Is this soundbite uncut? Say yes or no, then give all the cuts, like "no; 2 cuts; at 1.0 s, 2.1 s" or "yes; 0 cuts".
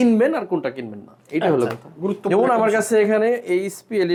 yes; 0 cuts